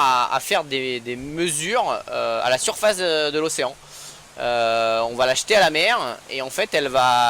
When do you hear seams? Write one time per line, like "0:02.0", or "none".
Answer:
none